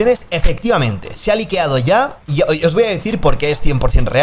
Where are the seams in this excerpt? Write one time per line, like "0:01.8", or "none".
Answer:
none